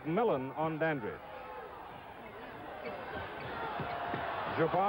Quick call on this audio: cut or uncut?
cut